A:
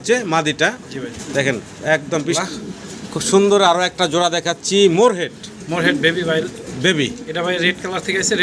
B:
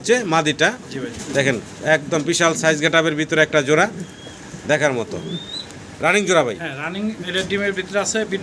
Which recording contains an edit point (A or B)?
A